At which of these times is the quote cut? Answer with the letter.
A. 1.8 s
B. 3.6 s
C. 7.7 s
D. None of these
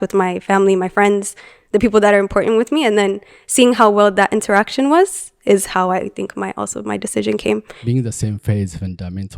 C